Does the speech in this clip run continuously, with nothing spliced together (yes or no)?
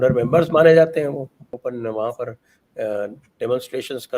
no